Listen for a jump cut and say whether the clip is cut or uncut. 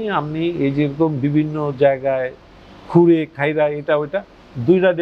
uncut